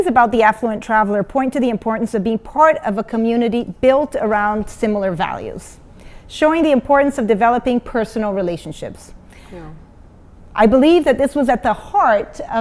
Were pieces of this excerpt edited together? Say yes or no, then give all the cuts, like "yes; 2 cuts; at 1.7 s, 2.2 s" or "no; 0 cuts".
no; 0 cuts